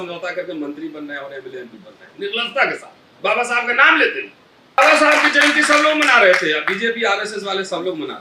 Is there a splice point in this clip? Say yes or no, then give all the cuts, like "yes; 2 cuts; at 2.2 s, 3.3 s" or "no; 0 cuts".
yes; 1 cut; at 4.8 s